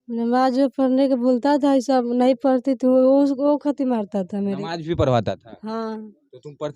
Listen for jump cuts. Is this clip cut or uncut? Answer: uncut